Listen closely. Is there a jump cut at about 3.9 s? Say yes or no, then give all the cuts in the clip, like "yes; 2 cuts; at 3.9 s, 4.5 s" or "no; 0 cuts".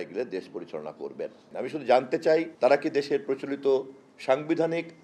no; 2 cuts; at 1.4 s, 2.5 s